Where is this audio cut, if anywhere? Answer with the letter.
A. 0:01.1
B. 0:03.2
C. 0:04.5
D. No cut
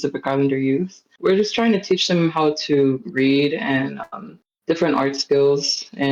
A